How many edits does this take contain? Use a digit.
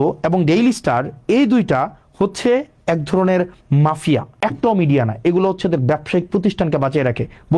1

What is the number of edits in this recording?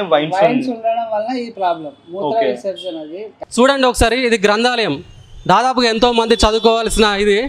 1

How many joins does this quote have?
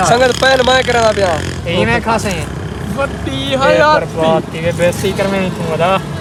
0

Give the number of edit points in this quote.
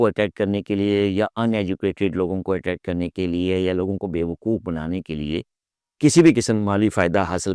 0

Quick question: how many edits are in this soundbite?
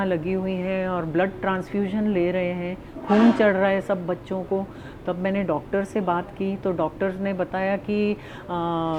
0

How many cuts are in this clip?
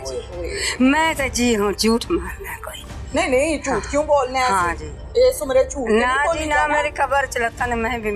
0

